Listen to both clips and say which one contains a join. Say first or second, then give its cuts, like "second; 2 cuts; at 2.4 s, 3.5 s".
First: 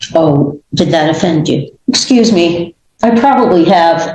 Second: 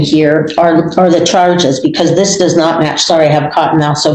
first; 2 cuts; at 1.7 s, 2.8 s